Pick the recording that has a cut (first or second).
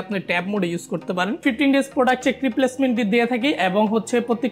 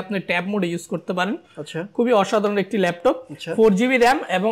first